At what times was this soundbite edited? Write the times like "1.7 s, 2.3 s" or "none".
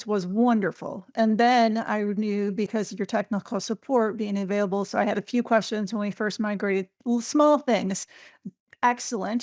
1.1 s